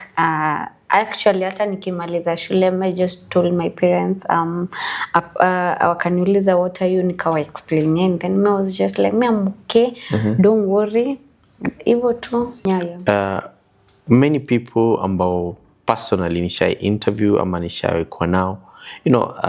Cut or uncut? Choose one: cut